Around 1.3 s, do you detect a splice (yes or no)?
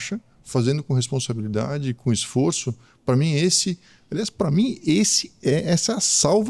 no